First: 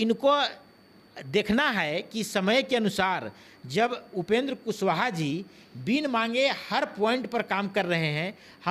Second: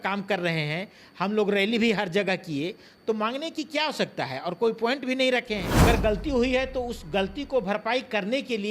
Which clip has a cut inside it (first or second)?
second